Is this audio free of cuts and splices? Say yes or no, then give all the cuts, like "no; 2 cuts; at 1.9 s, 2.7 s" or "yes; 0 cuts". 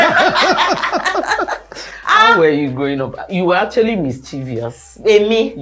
yes; 0 cuts